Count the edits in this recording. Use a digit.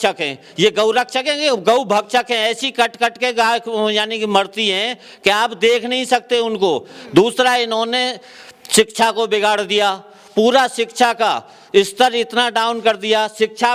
0